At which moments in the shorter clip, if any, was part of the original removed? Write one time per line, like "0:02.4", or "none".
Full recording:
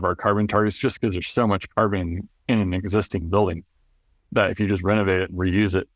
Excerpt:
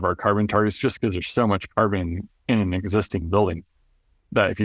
none